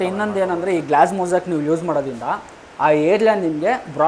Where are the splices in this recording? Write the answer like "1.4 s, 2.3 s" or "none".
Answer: none

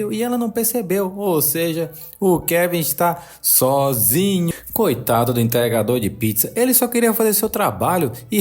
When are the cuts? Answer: 4.5 s

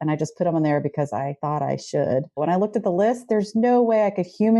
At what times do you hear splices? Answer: 1.4 s, 2.4 s

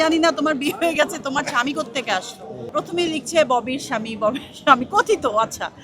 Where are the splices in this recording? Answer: 2.7 s

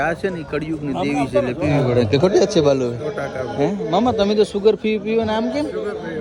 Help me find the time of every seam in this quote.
none

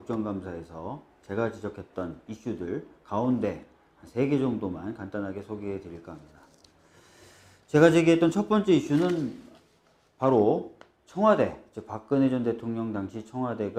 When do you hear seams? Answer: none

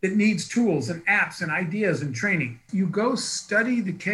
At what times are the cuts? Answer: 2.6 s

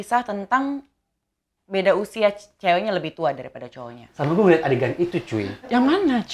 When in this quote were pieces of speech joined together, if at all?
3.9 s

